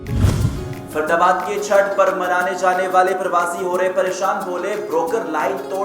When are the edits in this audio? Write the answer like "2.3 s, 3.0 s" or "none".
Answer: 0.9 s